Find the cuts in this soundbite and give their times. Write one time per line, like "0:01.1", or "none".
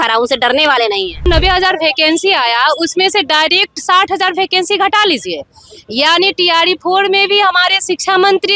0:01.2

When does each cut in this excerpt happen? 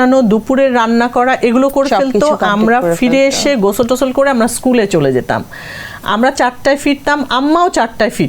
none

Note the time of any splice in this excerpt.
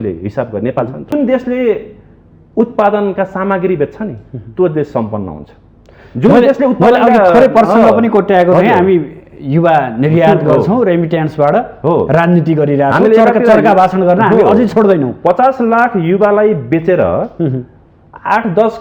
0:01.1

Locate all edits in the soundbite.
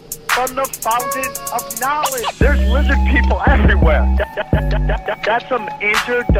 0:00.9

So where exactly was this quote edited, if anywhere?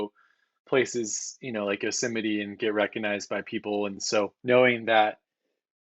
0:04.0

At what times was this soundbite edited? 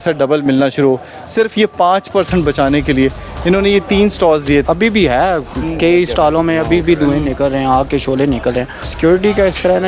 0:04.6
0:08.8

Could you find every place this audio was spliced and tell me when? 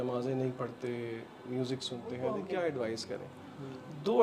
0:02.2

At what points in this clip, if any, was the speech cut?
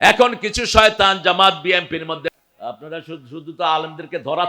0:02.3

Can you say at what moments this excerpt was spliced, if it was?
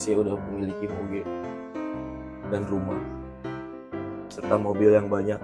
none

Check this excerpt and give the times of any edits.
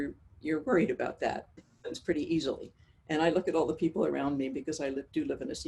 0:01.6

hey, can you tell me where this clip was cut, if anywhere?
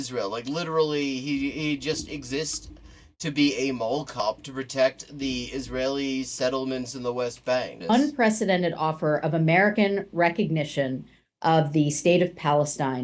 0:07.8

